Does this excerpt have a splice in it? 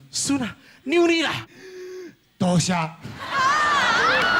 no; 0 cuts

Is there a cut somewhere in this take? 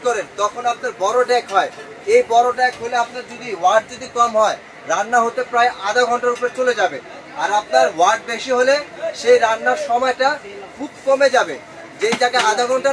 no; 0 cuts

